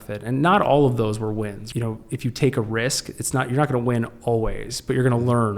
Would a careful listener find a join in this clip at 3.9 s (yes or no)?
no